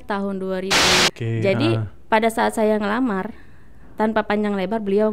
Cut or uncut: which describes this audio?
cut